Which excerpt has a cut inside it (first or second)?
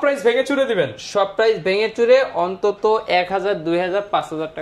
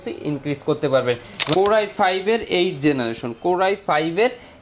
second